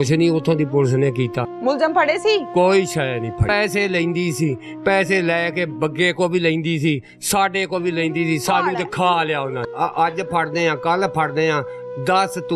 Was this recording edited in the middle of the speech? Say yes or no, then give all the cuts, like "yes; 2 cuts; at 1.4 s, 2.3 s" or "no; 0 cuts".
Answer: yes; 3 cuts; at 1.5 s, 3.5 s, 9.6 s